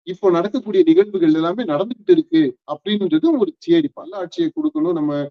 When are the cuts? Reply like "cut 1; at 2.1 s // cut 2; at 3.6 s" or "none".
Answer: cut 1; at 4.2 s